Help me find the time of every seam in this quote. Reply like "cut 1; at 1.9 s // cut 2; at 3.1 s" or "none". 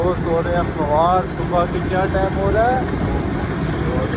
none

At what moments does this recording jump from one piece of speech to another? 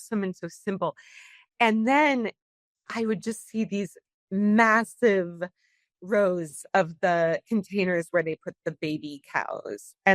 cut 1; at 4.1 s

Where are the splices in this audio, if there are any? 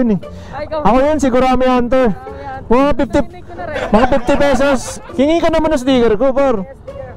cut 1; at 5.0 s

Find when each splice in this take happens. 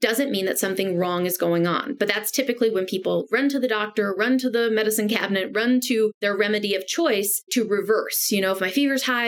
cut 1; at 6.1 s // cut 2; at 7.5 s

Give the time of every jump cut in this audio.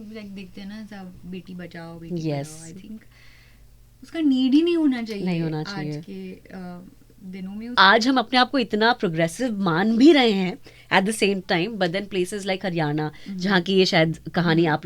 cut 1; at 7.8 s

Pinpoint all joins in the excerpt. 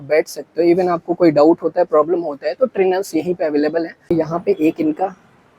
cut 1; at 4.1 s

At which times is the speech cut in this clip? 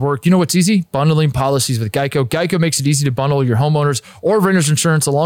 none

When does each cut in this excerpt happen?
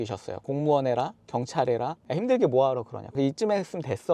cut 1; at 2.0 s // cut 2; at 3.1 s

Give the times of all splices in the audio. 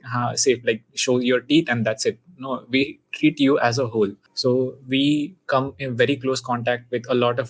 cut 1; at 4.3 s

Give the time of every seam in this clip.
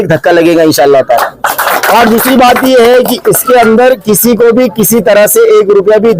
cut 1; at 1.6 s

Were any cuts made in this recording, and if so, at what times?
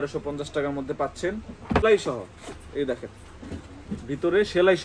cut 1; at 1.8 s

